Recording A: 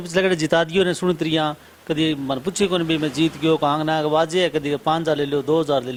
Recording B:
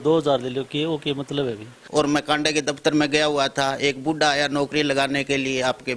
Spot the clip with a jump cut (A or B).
B